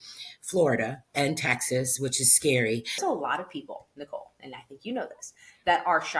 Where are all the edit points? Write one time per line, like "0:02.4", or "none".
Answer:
0:03.0

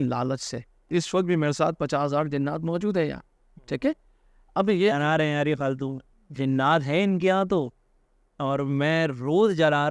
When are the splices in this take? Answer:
0:00.9
0:06.0

